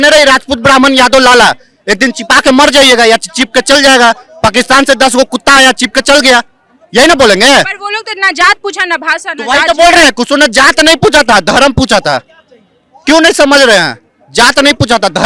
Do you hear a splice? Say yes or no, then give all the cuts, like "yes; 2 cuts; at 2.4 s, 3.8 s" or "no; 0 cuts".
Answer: no; 0 cuts